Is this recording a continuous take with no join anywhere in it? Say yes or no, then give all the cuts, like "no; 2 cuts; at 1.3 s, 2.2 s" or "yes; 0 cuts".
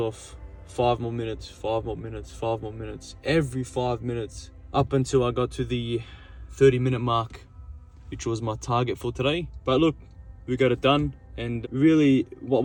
yes; 0 cuts